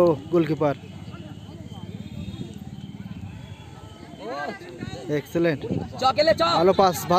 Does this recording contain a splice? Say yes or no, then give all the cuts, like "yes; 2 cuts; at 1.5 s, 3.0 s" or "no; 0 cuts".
yes; 1 cut; at 1.3 s